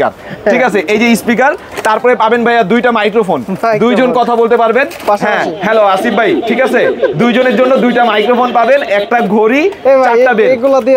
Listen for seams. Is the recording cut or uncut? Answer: uncut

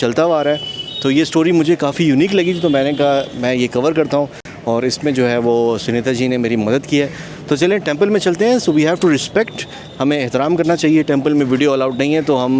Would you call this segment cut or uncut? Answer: uncut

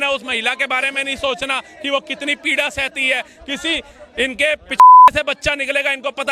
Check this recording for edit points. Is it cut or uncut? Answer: uncut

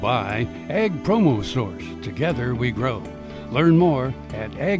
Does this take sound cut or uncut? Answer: uncut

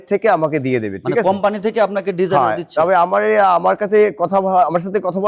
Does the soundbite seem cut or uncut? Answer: uncut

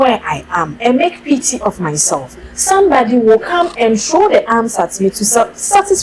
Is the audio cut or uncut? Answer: uncut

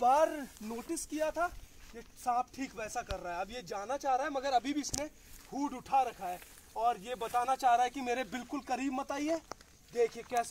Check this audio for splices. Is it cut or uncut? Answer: uncut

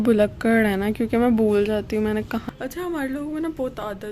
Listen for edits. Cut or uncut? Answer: cut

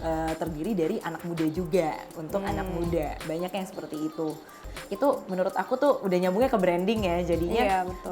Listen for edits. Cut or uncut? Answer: cut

